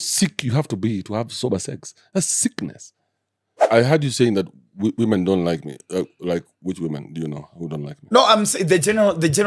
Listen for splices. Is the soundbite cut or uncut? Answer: cut